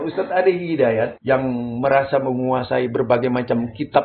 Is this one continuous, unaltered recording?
no; 1 cut; at 1.2 s

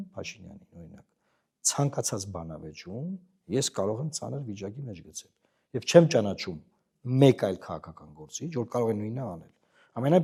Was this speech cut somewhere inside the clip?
no; 0 cuts

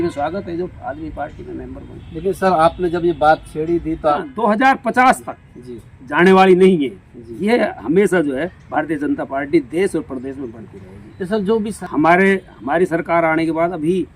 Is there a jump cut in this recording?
yes; 2 cuts; at 4.2 s, 11.7 s

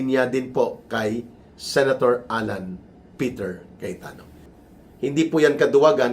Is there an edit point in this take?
yes; 1 cut; at 4.5 s

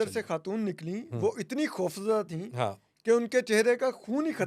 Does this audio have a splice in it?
no; 0 cuts

